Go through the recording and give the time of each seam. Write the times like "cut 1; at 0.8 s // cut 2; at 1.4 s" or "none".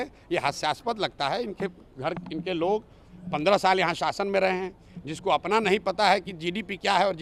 none